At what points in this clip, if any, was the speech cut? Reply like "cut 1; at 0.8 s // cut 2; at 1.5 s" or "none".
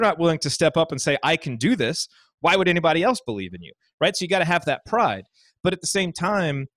none